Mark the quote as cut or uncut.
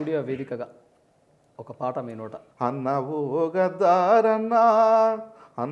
cut